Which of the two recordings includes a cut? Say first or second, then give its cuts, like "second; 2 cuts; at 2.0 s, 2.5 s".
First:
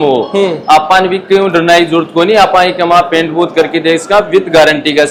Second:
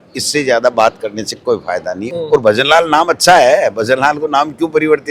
second; 1 cut; at 2.0 s